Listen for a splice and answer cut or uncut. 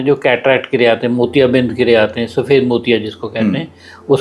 uncut